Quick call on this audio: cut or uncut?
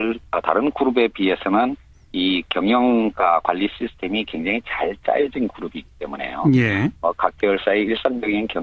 cut